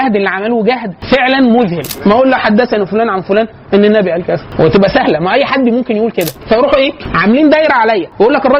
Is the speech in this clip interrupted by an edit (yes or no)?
yes